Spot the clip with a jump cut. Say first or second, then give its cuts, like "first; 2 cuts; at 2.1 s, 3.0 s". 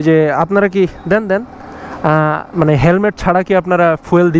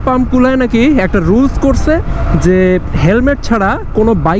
first; 1 cut; at 2.5 s